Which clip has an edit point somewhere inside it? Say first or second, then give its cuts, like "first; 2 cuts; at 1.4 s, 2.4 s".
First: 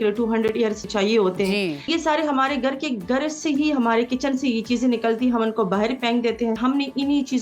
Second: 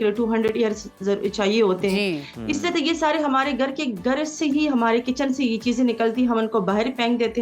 first; 3 cuts; at 0.9 s, 1.9 s, 6.6 s